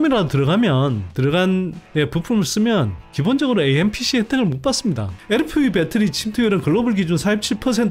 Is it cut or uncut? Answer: cut